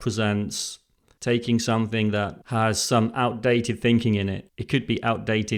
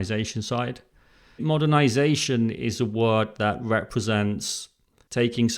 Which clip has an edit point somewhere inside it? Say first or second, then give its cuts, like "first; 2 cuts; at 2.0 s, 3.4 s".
second; 1 cut; at 1.4 s